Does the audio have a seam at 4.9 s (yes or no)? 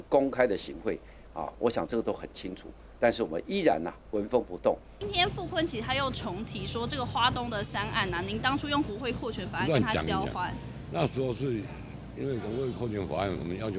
yes